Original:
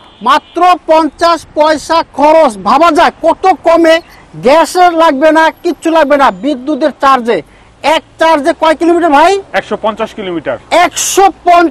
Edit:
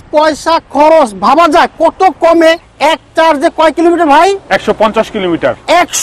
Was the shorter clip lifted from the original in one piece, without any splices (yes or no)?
no